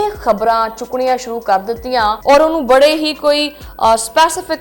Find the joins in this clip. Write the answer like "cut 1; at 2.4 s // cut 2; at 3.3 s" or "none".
cut 1; at 2.2 s